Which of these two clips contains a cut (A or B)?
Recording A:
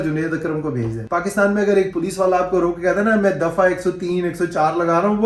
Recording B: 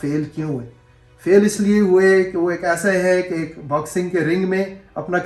A